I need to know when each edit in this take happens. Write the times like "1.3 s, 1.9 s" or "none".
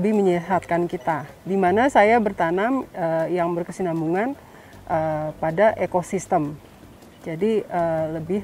1.3 s